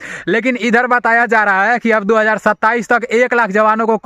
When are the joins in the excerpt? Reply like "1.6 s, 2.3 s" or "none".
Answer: none